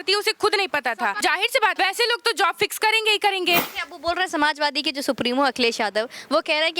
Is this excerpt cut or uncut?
cut